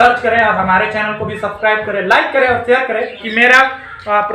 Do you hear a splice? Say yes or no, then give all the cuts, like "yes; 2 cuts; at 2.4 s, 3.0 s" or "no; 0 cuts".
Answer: yes; 1 cut; at 3.2 s